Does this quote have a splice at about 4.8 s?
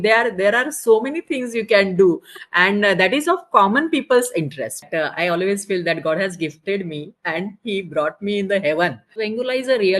yes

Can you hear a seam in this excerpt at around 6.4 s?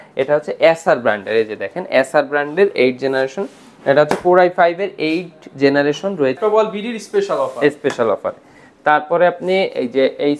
yes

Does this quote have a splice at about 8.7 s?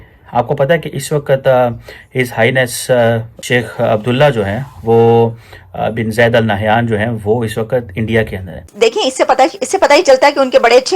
yes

